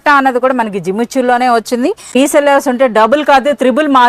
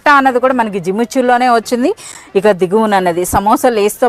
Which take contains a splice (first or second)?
first